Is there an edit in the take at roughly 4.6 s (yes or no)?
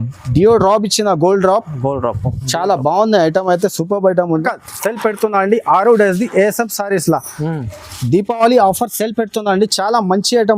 yes